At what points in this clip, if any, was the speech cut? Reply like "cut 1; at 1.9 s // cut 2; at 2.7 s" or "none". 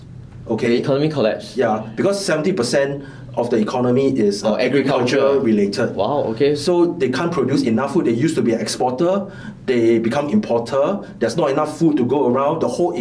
none